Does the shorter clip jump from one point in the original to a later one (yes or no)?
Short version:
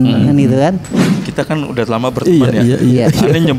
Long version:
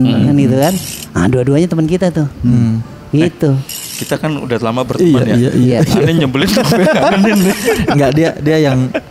yes